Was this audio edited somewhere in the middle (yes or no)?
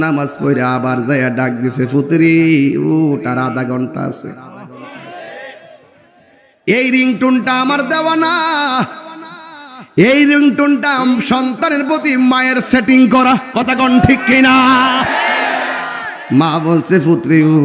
yes